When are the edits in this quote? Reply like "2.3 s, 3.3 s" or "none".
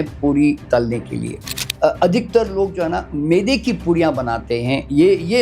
1.6 s